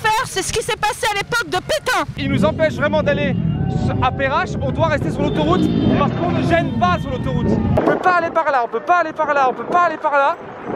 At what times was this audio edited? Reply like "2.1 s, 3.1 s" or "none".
2.3 s, 7.8 s